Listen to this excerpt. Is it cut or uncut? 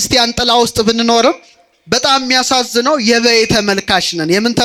uncut